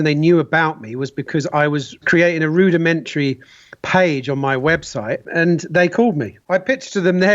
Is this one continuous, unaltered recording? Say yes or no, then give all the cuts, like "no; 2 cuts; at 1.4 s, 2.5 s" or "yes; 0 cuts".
no; 3 cuts; at 2.0 s, 5.3 s, 6.3 s